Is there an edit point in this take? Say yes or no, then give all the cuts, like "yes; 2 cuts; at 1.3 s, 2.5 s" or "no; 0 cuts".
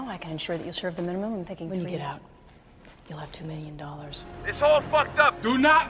yes; 1 cut; at 4.4 s